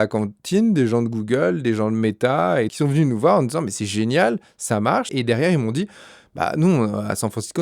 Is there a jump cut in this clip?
yes; 2 cuts; at 2.7 s, 5.1 s

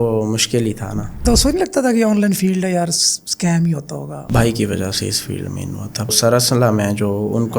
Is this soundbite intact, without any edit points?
no; 3 cuts; at 1.2 s, 4.2 s, 6.1 s

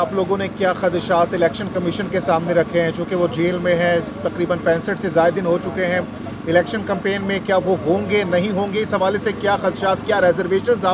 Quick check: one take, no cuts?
yes; 0 cuts

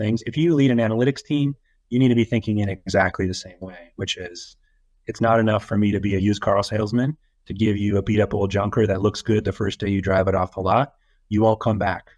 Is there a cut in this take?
no; 0 cuts

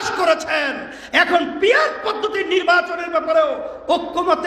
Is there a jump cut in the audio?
no; 0 cuts

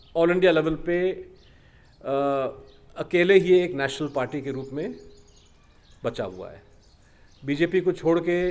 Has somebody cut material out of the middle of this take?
no; 0 cuts

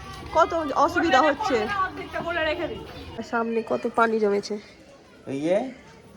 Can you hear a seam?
yes; 1 cut; at 3.2 s

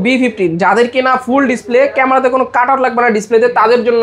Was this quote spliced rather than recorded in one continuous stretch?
no; 0 cuts

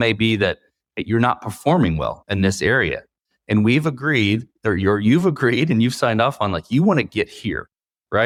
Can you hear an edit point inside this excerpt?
no; 0 cuts

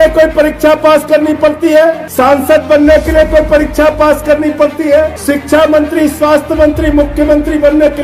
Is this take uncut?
no; 2 cuts; at 2.0 s, 5.2 s

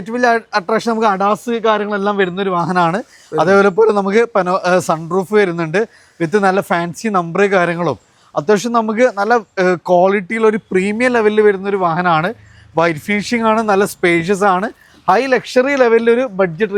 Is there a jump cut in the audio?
no; 0 cuts

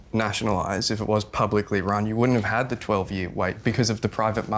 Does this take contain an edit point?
yes; 1 cut; at 3.6 s

